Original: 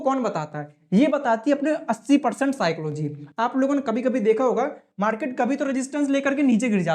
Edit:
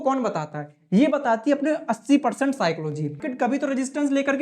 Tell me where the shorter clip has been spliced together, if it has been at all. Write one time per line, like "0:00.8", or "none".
0:03.3